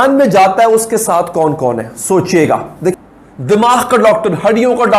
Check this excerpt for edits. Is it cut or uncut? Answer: cut